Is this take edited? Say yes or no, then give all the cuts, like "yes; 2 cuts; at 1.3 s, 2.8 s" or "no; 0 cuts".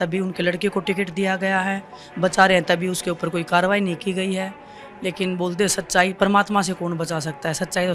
no; 0 cuts